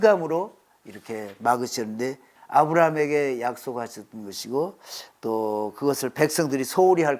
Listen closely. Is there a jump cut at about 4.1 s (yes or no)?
no